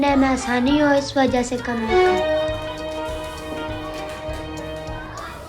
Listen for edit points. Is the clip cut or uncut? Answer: uncut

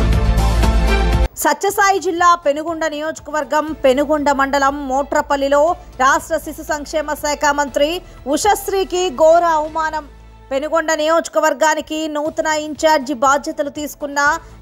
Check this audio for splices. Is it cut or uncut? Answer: cut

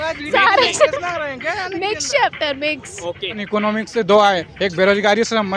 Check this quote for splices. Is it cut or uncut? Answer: cut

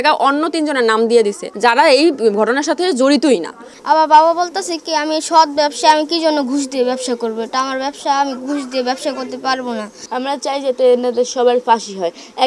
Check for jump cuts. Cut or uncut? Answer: cut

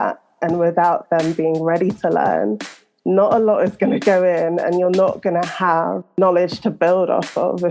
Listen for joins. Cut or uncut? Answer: cut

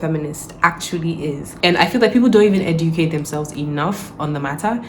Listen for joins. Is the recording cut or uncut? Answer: cut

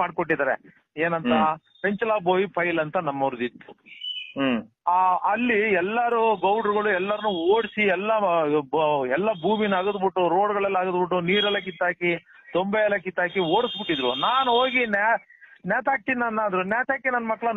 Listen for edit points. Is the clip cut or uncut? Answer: uncut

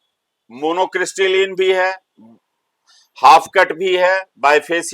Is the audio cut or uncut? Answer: uncut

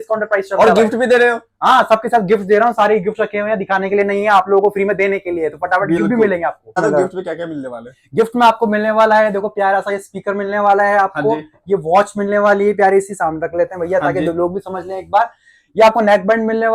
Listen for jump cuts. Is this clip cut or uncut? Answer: cut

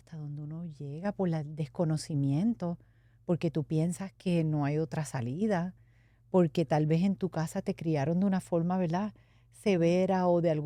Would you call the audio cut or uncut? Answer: uncut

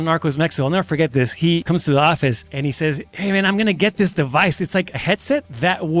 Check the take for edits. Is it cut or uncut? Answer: cut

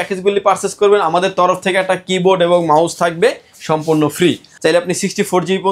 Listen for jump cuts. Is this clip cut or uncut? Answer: cut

